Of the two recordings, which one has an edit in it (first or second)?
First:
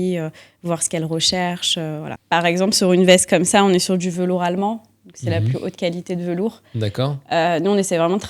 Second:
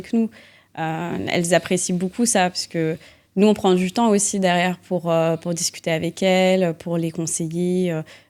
first